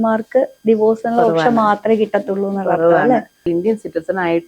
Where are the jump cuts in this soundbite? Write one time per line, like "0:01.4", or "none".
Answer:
0:03.4